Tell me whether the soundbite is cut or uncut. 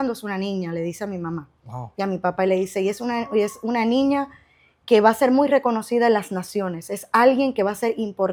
uncut